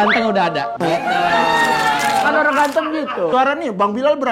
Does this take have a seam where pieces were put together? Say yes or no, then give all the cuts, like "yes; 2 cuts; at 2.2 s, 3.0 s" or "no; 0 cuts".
yes; 2 cuts; at 2.1 s, 3.3 s